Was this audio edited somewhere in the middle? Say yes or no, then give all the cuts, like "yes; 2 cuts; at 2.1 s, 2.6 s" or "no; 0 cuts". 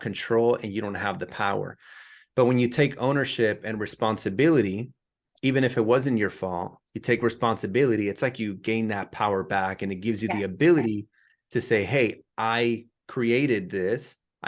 no; 0 cuts